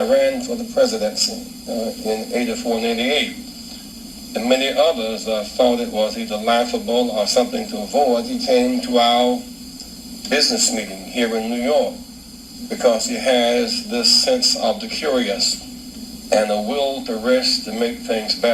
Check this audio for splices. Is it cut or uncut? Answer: cut